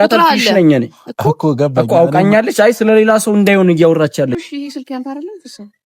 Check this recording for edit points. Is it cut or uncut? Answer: cut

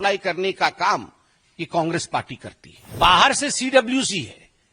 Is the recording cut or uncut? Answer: cut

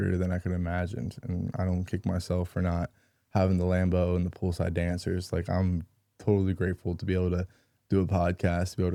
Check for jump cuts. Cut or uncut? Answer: uncut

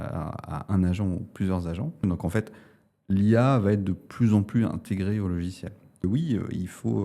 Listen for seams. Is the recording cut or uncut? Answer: cut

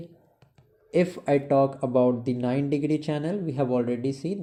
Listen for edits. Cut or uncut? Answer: uncut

